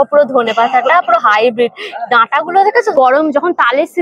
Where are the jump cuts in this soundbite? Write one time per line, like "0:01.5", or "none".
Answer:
0:02.9